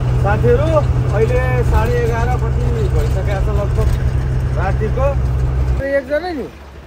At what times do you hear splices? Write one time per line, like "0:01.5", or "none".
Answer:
0:05.8